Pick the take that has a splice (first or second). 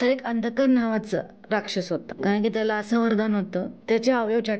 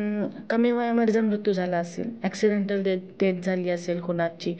first